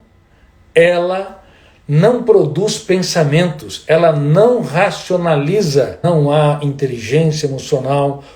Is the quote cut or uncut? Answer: cut